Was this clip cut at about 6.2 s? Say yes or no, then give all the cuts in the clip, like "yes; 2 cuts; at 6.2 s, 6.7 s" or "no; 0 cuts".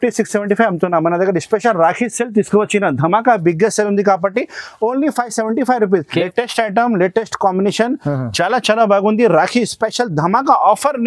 yes; 1 cut; at 6.2 s